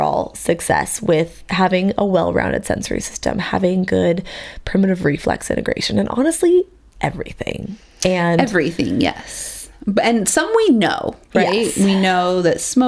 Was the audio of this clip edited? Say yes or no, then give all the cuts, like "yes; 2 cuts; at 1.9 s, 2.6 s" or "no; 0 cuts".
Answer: no; 0 cuts